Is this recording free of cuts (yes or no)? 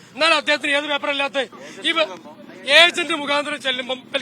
no